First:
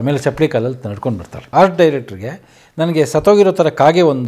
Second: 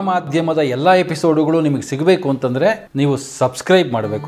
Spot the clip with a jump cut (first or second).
first